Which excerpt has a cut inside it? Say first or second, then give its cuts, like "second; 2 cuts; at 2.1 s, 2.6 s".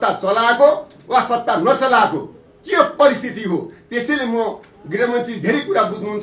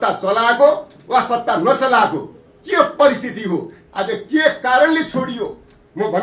second; 1 cut; at 3.8 s